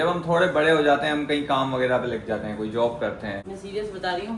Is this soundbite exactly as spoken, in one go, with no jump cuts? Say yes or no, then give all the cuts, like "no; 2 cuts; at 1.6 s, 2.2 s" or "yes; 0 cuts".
no; 1 cut; at 3.5 s